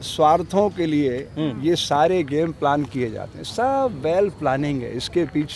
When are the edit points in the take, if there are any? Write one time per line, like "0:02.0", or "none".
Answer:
none